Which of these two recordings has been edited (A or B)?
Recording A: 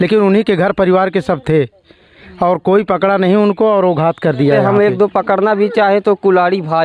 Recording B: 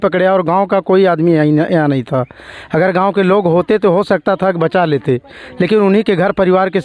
A